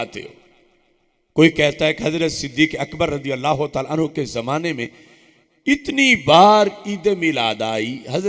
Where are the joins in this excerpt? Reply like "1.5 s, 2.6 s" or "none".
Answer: none